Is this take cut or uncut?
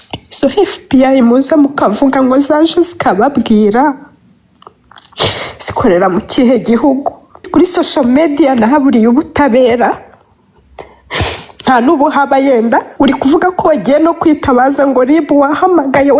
cut